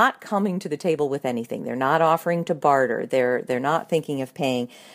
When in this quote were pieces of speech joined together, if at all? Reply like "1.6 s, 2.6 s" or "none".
none